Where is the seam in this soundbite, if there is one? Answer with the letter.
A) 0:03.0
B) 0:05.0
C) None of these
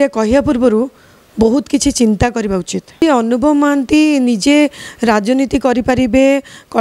A